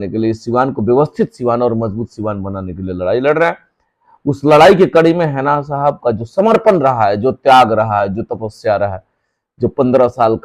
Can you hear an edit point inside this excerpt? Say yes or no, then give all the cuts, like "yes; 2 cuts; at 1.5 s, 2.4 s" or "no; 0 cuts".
no; 0 cuts